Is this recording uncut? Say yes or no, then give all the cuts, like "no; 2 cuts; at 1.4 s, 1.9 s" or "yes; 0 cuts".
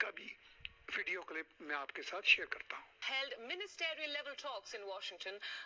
no; 1 cut; at 2.9 s